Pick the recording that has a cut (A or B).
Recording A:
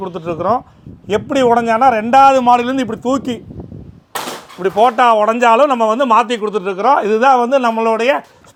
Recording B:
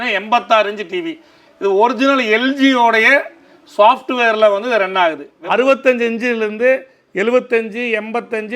B